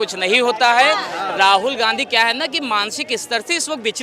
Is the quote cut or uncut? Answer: uncut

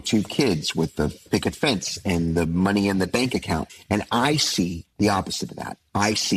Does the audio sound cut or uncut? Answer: cut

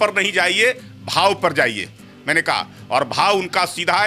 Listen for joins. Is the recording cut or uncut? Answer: uncut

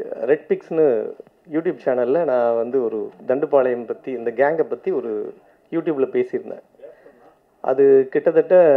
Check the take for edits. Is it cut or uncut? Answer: uncut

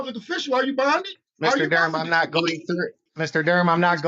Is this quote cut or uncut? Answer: cut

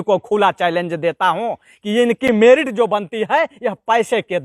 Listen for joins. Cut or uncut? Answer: uncut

